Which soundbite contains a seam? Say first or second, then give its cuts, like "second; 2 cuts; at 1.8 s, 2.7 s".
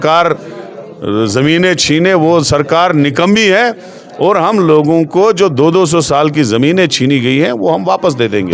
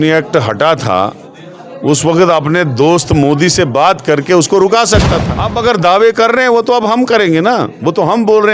second; 1 cut; at 5.0 s